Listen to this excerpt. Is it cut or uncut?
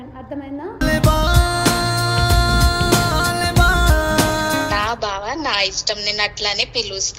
cut